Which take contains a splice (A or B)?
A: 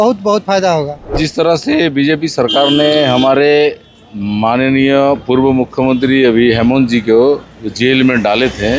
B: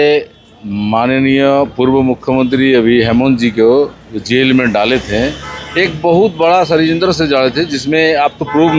A